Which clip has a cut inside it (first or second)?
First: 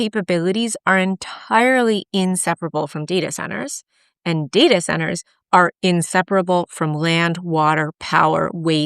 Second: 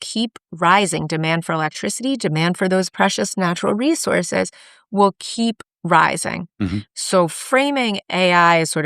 second